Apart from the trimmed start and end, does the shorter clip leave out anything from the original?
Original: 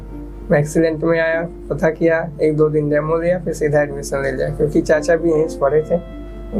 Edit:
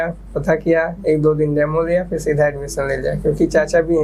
no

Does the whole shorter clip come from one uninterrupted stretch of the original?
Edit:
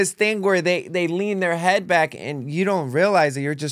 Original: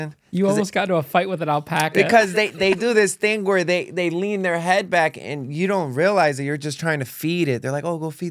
yes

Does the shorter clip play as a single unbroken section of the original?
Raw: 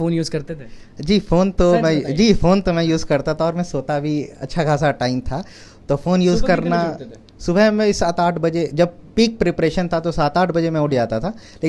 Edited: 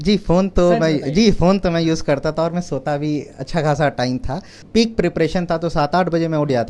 no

